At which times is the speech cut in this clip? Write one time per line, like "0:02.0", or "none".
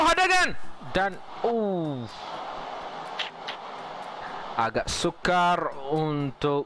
none

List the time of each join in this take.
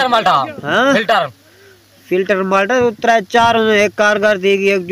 none

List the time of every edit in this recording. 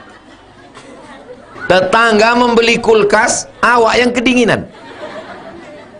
0:01.6

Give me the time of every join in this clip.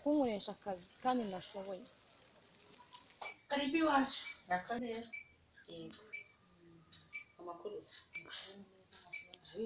0:03.4
0:04.8

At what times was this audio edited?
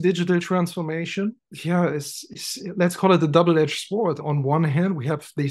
0:01.5

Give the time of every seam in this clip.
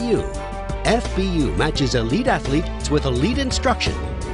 none

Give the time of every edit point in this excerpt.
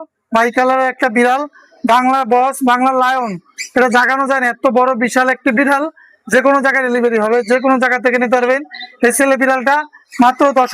none

